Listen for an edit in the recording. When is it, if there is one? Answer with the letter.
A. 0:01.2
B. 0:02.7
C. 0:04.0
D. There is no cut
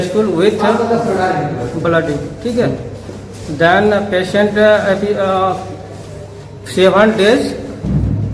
D